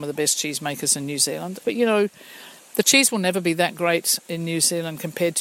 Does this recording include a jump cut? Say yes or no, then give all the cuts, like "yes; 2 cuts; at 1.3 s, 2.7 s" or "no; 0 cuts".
yes; 1 cut; at 1.6 s